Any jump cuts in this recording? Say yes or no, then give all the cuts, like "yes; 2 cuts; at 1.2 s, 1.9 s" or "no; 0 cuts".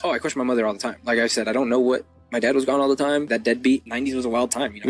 yes; 2 cuts; at 1.0 s, 3.7 s